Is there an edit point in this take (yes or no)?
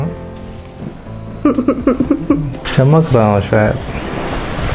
yes